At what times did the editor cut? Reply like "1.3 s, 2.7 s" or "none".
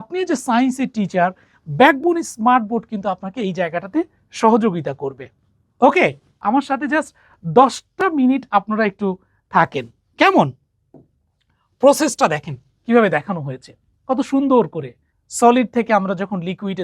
6.3 s